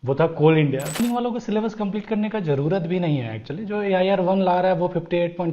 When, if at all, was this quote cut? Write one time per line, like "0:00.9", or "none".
0:01.0

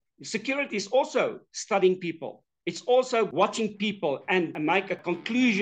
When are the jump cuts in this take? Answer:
0:03.3
0:04.8

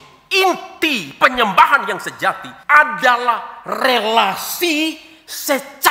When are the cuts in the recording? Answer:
0:02.5

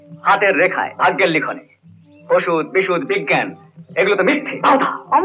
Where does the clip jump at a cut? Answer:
none

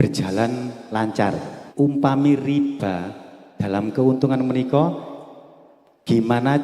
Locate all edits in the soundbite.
0:01.6

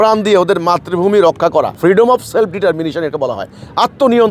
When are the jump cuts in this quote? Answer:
0:01.7

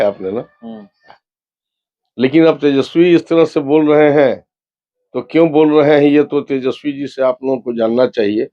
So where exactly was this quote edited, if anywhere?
0:01.3

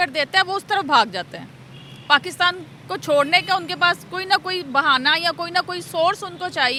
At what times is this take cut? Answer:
none

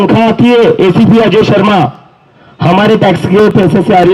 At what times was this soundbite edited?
none

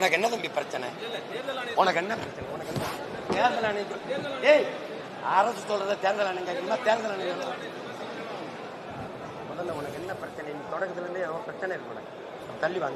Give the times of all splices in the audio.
none

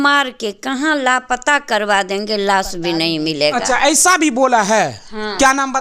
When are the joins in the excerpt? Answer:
none

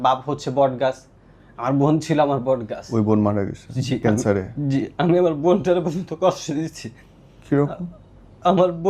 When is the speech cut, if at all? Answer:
0:02.8
0:04.0

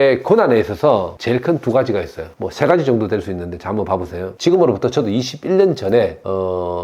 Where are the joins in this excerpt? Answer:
0:04.2

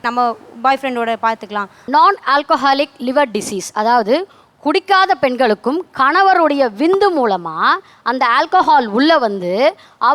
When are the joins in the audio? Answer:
0:01.8

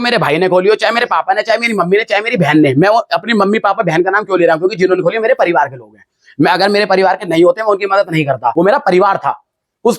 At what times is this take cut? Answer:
0:08.5

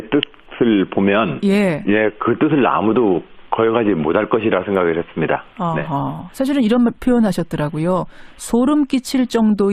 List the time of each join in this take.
0:06.7

